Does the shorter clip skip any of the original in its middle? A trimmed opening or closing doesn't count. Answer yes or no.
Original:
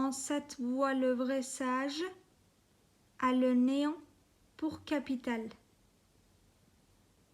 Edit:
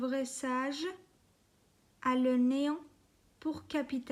no